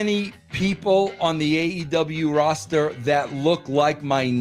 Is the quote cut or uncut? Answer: uncut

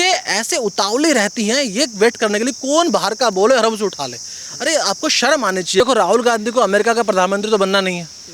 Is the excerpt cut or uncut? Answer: cut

